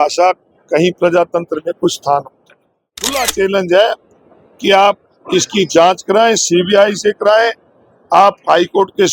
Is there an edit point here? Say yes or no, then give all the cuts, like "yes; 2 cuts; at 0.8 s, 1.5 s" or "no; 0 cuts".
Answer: yes; 1 cut; at 3.2 s